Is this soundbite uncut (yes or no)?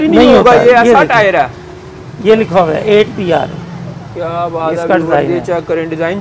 yes